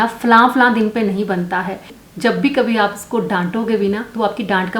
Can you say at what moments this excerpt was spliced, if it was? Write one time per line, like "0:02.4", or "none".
0:01.9

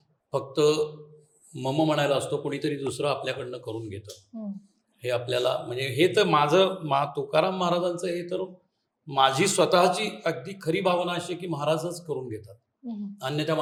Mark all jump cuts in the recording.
none

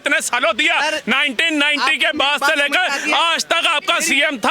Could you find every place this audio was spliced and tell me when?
none

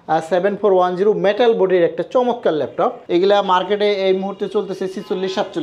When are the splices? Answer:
0:03.0

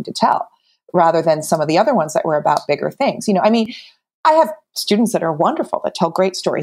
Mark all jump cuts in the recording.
none

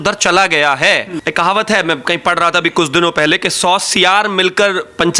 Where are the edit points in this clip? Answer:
0:01.2

